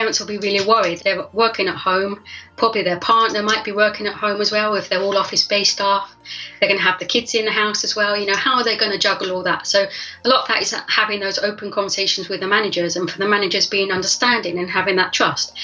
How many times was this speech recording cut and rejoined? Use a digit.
2